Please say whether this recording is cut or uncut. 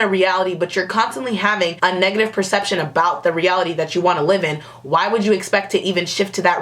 uncut